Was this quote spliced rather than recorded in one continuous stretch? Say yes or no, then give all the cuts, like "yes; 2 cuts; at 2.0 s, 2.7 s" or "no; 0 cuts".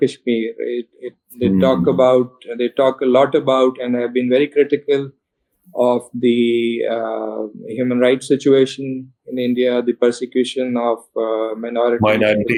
no; 0 cuts